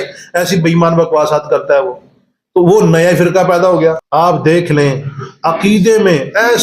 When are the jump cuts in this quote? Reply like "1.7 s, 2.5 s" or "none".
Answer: 4.0 s